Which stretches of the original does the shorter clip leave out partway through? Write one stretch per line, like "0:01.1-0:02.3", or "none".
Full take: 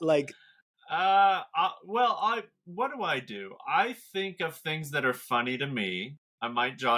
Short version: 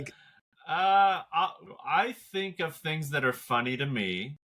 0:01.8-0:03.4